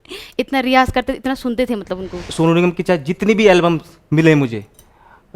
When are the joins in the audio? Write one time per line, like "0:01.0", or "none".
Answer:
0:02.2